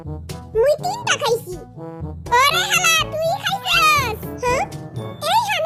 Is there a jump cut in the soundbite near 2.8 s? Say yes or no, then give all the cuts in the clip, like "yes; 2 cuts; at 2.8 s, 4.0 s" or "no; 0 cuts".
no; 0 cuts